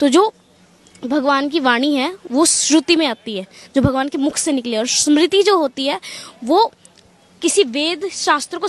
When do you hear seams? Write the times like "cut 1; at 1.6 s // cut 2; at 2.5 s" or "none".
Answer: none